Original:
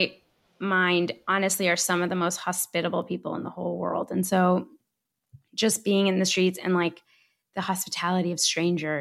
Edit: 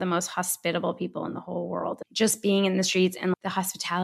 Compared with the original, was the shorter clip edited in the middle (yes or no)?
yes